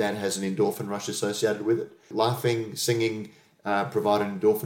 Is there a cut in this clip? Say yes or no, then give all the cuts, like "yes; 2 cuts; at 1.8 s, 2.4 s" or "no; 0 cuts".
yes; 1 cut; at 2.1 s